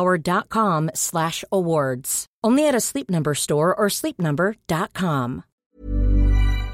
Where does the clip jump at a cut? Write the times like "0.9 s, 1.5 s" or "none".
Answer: 5.5 s